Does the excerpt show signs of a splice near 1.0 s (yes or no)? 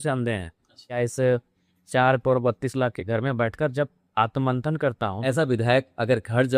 yes